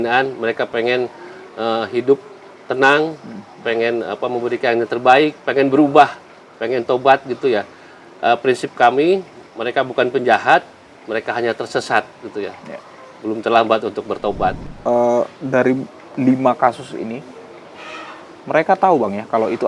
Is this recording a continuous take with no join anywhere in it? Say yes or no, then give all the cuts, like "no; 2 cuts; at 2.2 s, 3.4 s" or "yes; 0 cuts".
no; 1 cut; at 14.7 s